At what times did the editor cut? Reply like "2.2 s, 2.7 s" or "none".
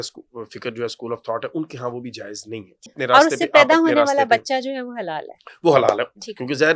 2.8 s

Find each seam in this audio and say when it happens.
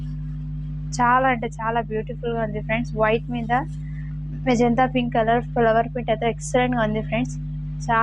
none

